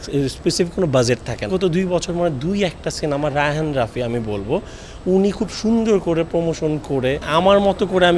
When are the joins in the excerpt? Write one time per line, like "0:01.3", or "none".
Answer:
0:01.5
0:07.2